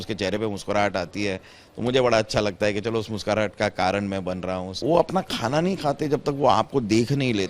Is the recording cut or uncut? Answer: cut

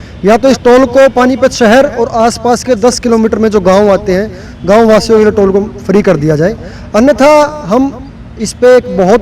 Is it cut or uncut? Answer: uncut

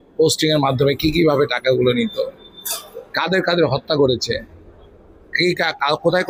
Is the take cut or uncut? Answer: uncut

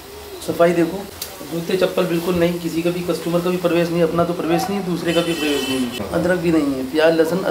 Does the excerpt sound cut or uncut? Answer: cut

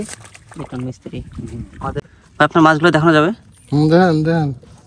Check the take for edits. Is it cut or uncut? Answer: cut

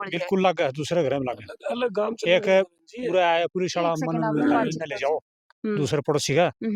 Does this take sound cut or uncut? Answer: uncut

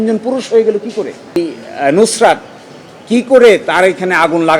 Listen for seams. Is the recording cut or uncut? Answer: cut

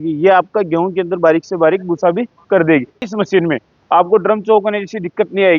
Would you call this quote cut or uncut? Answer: cut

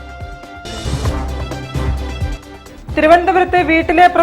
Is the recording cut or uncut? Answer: cut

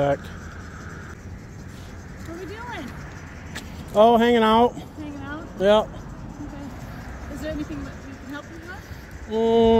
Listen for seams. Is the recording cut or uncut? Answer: cut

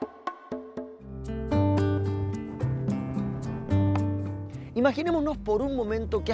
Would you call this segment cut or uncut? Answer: cut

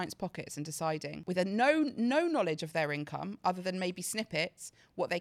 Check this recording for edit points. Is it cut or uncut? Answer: uncut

